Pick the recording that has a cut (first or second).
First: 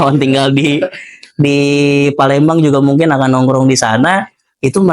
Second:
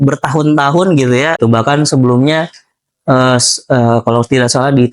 second